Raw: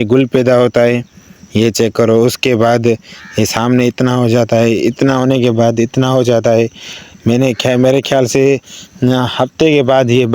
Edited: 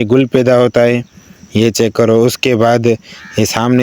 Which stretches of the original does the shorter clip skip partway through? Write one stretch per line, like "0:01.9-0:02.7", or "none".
none